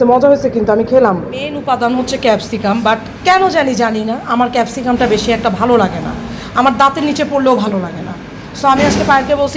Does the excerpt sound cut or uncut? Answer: cut